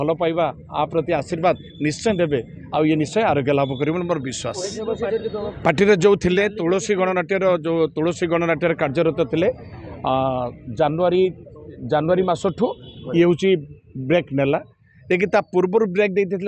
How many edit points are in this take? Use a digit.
1